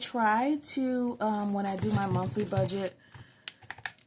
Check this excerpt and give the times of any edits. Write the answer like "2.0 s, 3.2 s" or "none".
none